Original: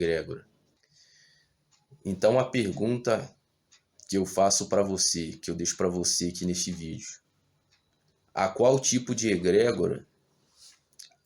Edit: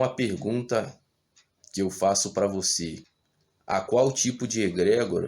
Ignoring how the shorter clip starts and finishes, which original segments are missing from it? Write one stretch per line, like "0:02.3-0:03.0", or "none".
0:05.4-0:07.7